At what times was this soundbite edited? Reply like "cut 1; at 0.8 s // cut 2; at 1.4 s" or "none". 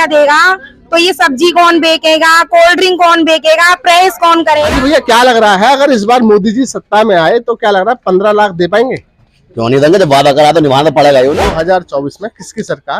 cut 1; at 4.7 s // cut 2; at 11.5 s